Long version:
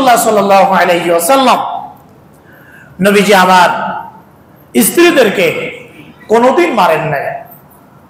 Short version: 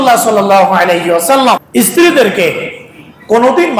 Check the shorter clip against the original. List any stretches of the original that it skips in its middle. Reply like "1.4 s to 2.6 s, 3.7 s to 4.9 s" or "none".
1.6 s to 4.6 s

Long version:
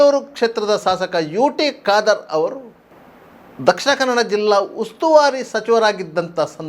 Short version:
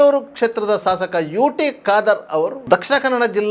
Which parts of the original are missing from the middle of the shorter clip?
2.6 s to 3.5 s

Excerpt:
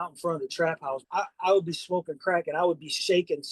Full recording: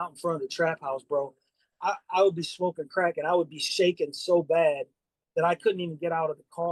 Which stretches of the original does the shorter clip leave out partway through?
1.0 s to 1.7 s

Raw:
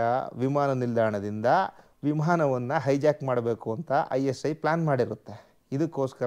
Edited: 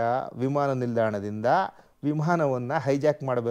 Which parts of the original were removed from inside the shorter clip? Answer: none

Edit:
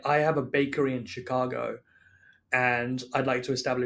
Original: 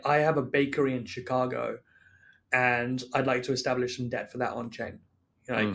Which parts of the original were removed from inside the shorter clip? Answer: none

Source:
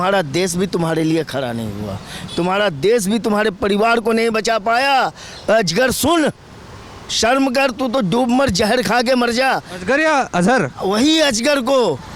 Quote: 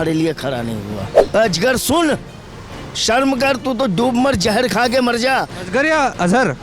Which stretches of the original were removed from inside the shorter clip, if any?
2.0 s to 5.3 s

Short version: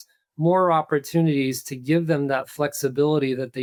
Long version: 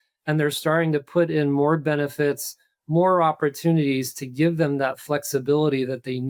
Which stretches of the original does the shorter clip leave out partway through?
none

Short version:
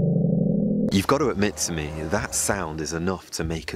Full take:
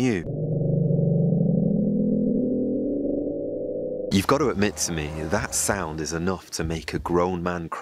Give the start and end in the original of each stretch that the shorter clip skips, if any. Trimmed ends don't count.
2.1 s to 4.1 s

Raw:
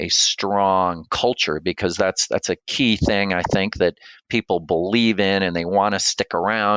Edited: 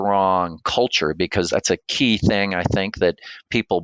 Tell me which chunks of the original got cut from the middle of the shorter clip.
1.9 s to 2.3 s

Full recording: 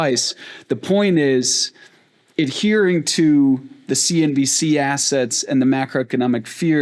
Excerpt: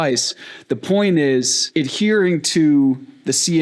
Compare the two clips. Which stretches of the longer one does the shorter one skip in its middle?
1.6 s to 2.2 s

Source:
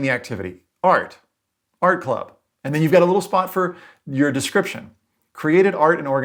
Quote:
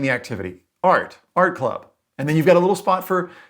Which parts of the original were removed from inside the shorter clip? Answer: 1.2 s to 1.6 s

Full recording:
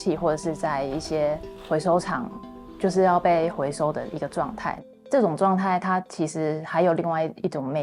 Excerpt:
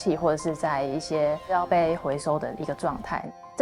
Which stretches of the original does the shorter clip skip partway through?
1.5 s to 3.1 s

